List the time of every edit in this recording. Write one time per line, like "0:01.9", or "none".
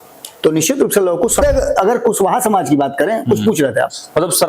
0:01.4